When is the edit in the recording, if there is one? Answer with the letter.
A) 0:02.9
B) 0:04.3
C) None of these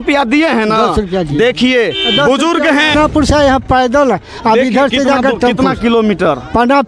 A